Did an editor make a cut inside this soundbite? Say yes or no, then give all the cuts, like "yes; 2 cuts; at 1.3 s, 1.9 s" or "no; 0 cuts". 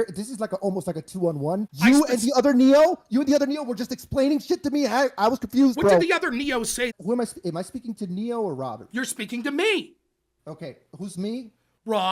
yes; 2 cuts; at 1.7 s, 6.9 s